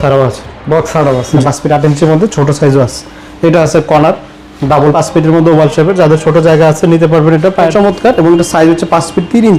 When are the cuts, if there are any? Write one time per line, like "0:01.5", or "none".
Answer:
0:01.4
0:04.9
0:07.7